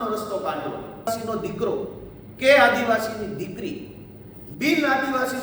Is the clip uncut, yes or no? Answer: no